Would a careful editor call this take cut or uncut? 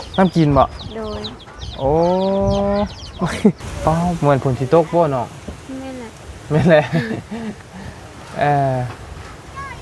cut